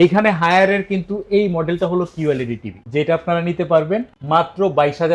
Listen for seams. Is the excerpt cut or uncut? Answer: uncut